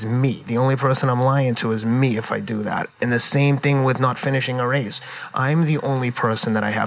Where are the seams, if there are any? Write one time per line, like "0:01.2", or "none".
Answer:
0:03.0